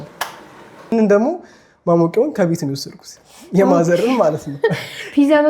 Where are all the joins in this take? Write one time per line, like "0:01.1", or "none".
0:00.9